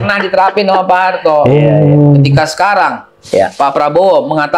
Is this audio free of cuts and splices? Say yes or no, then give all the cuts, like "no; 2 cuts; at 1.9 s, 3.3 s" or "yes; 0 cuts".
yes; 0 cuts